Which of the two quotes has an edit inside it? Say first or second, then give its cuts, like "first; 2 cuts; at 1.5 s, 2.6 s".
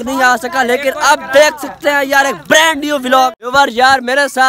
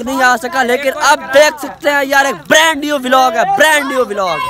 first; 1 cut; at 3.3 s